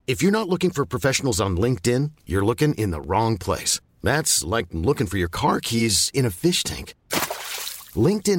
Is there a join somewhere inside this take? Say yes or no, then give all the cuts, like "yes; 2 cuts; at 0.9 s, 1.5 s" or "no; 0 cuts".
no; 0 cuts